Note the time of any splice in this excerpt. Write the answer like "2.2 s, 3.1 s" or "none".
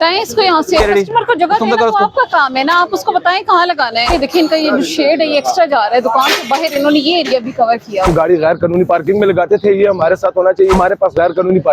0.8 s, 4.1 s, 8.1 s, 10.8 s